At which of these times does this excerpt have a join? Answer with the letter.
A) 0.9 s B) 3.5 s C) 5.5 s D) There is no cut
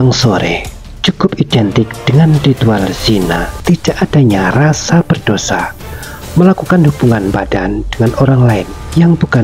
B